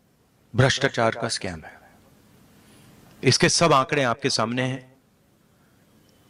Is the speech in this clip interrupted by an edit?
no; 0 cuts

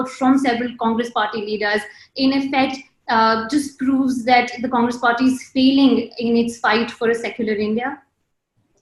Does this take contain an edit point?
no; 0 cuts

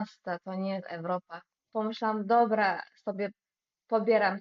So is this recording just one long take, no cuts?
no; 1 cut; at 1.6 s

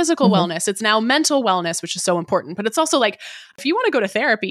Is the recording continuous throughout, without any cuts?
no; 1 cut; at 3.5 s

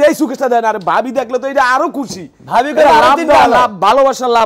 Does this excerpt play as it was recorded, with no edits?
yes; 0 cuts

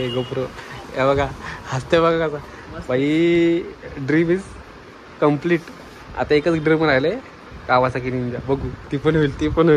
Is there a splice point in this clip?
no; 0 cuts

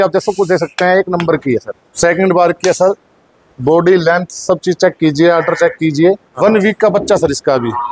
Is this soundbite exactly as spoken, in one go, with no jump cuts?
no; 2 cuts; at 1.8 s, 6.3 s

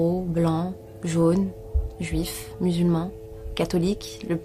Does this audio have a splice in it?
yes; 1 cut; at 1.0 s

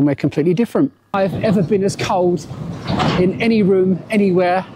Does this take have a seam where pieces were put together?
yes; 1 cut; at 1.2 s

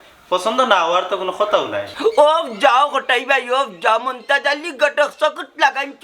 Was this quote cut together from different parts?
yes; 1 cut; at 1.9 s

